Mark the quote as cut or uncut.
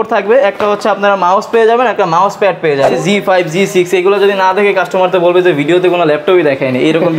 cut